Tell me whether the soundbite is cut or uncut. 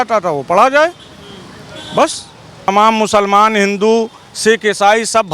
cut